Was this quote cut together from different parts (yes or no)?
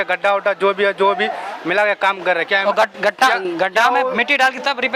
no